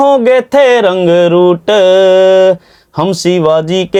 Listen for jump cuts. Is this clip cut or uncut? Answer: uncut